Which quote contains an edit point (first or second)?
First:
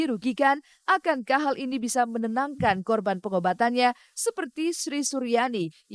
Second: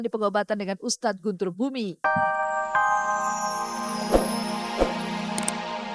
second